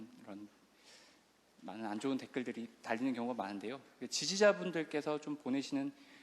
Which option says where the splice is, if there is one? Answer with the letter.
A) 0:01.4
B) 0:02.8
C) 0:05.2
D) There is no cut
A